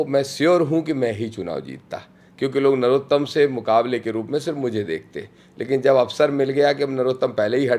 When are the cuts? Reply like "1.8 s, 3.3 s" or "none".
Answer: none

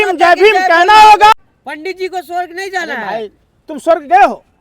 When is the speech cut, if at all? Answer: 1.4 s

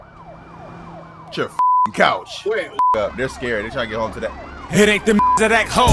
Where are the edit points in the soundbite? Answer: 2.9 s

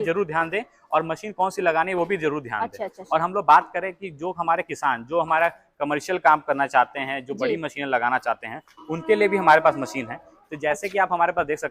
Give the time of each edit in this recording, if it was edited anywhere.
none

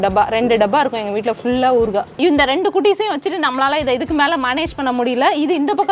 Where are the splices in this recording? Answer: 2.2 s

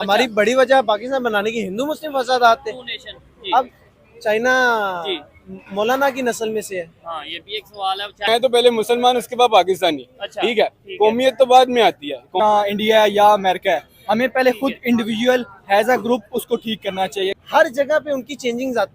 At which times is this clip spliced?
8.3 s, 12.4 s, 17.3 s

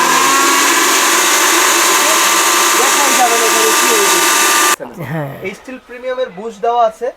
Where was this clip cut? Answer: 4.7 s

